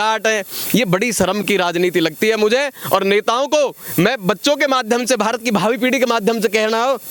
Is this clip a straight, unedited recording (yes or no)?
yes